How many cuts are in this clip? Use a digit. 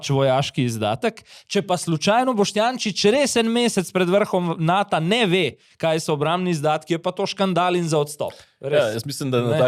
0